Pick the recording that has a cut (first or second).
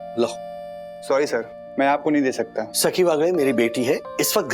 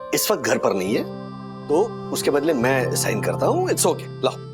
first